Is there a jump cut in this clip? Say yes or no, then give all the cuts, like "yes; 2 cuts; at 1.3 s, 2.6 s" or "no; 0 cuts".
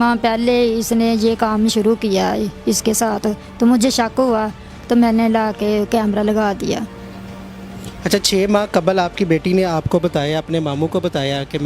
no; 0 cuts